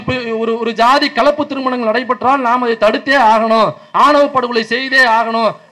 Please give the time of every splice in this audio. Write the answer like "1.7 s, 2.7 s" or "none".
none